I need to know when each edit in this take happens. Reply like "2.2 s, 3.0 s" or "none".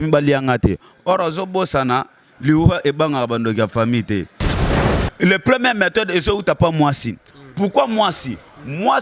4.7 s